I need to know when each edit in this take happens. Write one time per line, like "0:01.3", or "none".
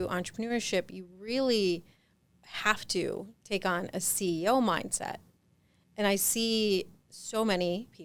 none